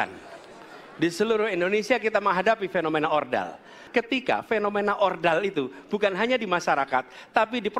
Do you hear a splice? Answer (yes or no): yes